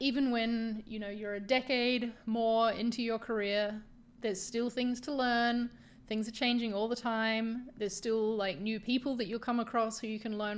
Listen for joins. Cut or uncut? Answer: uncut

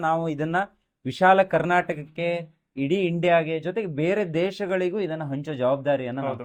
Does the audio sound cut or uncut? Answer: uncut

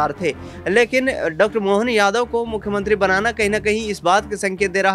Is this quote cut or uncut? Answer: uncut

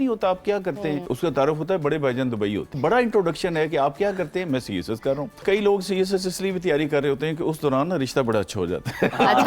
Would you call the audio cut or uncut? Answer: cut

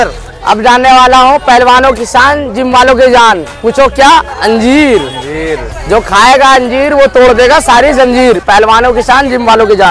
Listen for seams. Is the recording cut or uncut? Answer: uncut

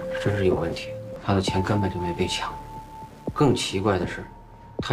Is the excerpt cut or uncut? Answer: cut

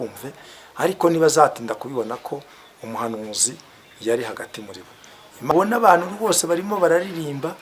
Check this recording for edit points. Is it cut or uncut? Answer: cut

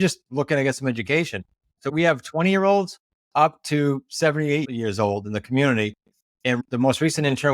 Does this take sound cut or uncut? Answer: cut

